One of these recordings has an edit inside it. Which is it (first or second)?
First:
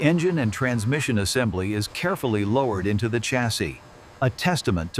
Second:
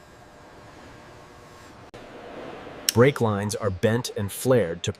second